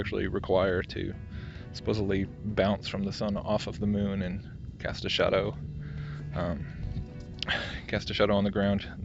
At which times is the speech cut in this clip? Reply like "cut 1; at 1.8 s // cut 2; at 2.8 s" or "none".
cut 1; at 4.5 s